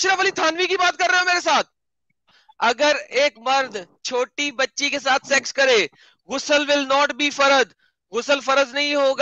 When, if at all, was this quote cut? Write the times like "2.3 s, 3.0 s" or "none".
2.3 s